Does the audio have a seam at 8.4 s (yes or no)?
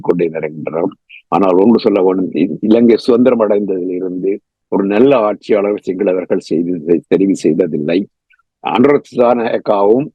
yes